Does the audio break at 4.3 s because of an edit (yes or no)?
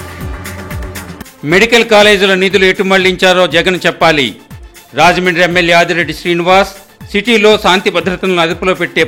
no